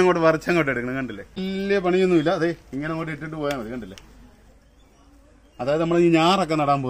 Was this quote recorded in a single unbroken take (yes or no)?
no